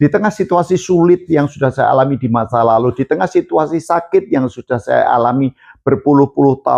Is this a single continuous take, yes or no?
yes